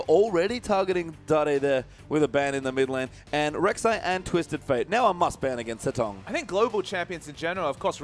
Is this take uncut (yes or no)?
yes